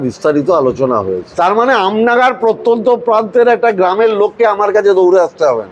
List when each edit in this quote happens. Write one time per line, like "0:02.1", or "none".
0:01.3